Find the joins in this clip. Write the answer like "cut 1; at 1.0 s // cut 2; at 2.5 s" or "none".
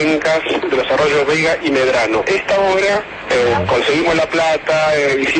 cut 1; at 2.2 s